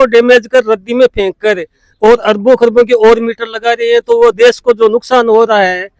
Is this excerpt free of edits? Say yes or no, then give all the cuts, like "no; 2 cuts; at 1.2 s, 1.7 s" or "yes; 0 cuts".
yes; 0 cuts